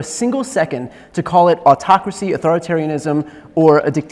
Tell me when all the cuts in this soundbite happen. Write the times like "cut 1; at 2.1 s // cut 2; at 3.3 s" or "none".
none